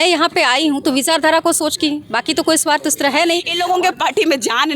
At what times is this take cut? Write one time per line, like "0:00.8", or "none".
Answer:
0:03.5